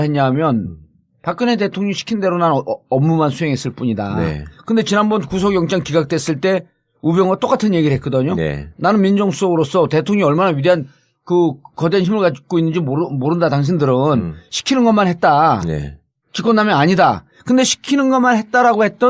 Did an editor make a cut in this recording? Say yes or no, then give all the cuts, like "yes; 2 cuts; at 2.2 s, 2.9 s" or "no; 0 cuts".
yes; 1 cut; at 14.6 s